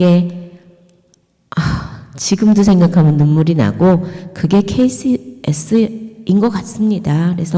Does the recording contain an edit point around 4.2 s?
no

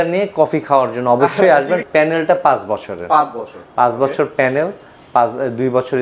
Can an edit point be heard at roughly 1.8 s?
yes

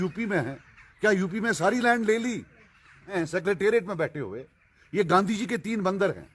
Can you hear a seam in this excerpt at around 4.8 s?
no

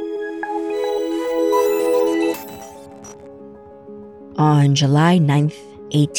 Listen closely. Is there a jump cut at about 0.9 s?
no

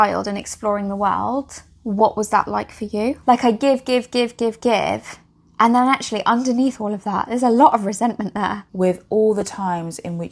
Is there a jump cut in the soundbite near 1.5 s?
no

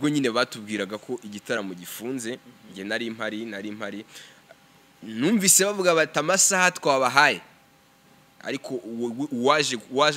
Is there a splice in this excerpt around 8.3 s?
yes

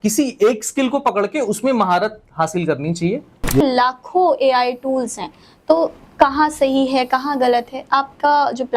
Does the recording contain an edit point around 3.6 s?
yes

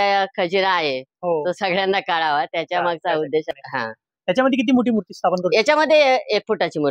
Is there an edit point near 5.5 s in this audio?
no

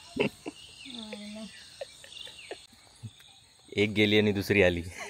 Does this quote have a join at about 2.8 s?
yes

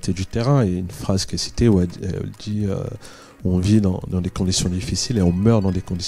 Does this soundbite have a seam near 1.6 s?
no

